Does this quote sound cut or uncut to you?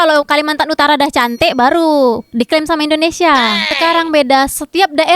cut